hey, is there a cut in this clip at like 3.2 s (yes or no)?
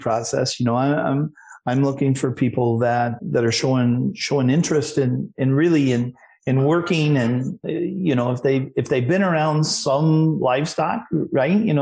yes